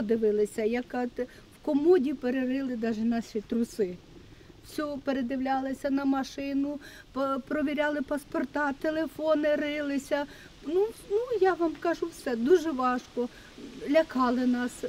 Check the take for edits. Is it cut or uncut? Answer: uncut